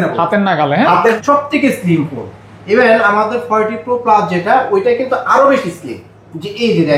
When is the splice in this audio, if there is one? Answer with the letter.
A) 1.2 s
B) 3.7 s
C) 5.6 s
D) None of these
A